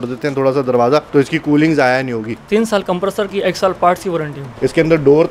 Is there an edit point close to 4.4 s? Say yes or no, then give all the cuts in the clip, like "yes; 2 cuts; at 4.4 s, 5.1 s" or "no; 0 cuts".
yes; 3 cuts; at 1.1 s, 2.3 s, 4.4 s